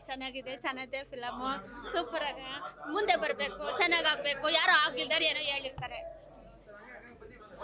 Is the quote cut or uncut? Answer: uncut